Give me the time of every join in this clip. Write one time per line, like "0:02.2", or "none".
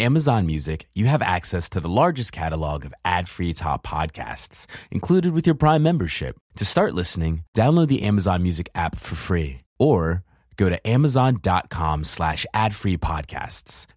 none